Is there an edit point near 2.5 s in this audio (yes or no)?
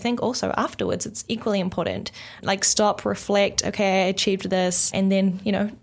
yes